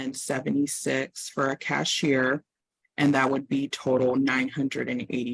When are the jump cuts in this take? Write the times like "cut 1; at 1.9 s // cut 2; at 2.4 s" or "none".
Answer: none

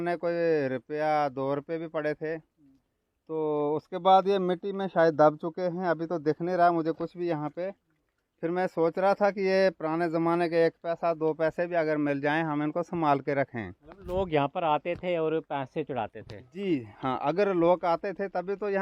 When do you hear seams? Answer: none

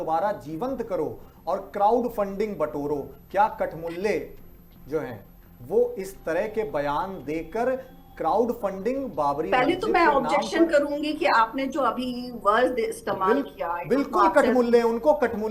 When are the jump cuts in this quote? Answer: none

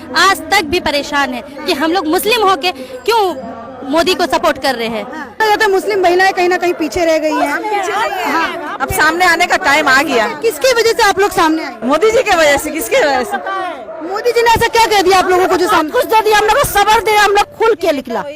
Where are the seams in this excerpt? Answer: cut 1; at 5.4 s // cut 2; at 11.7 s // cut 3; at 17.4 s

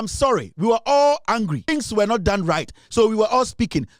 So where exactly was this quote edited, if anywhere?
cut 1; at 1.6 s

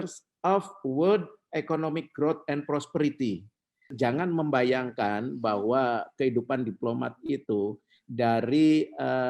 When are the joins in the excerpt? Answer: cut 1; at 3.9 s

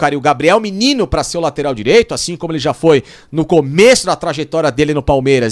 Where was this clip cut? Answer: none

